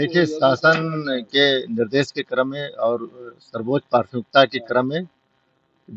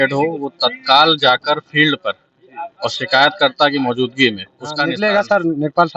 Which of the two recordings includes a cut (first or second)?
second